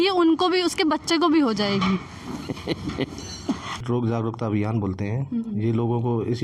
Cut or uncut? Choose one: cut